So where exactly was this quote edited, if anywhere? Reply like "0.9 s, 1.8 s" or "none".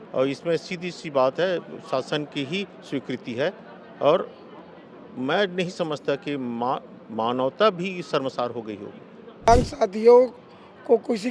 9.5 s